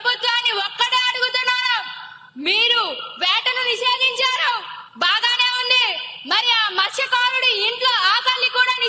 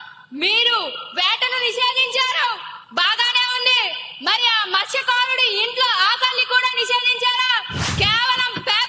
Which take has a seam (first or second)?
second